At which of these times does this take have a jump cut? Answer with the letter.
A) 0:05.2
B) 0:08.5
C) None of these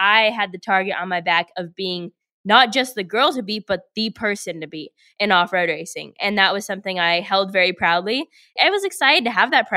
B